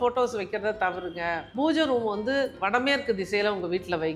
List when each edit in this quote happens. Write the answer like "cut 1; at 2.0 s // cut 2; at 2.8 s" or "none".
cut 1; at 1.4 s